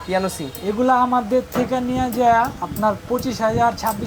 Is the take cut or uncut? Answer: uncut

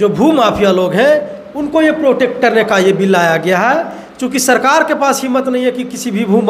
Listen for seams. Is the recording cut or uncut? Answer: uncut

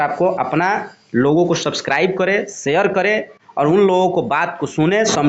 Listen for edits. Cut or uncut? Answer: uncut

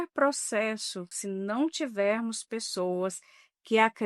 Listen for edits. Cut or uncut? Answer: cut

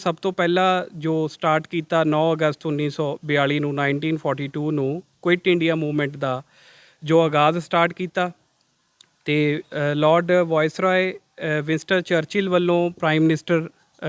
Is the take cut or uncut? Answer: uncut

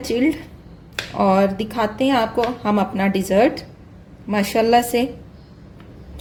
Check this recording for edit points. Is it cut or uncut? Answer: uncut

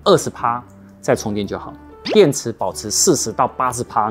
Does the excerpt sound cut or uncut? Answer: cut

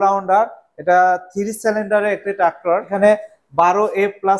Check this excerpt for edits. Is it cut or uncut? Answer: cut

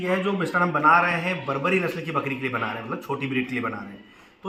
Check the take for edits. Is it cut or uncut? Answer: uncut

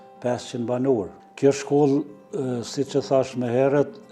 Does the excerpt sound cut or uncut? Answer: cut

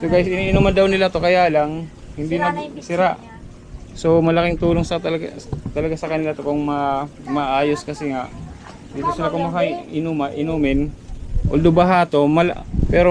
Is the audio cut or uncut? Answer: uncut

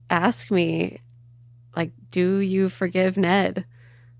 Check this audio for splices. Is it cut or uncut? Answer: uncut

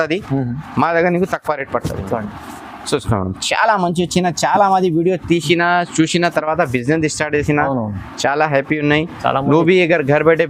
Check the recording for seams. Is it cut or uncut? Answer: uncut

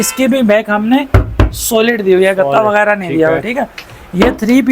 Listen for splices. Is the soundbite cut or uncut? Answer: uncut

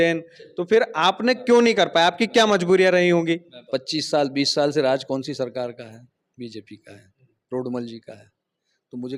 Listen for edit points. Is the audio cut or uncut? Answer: cut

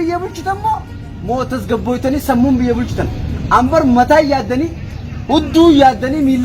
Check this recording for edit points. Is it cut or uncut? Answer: uncut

